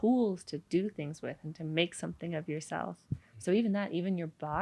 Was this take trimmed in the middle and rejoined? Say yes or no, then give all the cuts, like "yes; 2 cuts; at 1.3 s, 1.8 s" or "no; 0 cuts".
no; 0 cuts